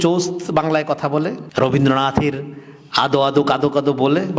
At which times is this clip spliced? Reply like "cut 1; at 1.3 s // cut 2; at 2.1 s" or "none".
cut 1; at 1.4 s